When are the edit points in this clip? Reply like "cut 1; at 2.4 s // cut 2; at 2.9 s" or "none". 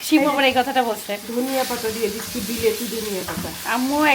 none